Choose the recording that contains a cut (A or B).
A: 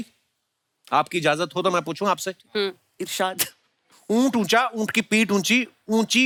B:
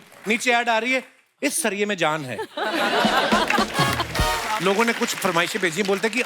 B